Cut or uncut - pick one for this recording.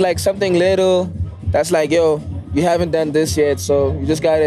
cut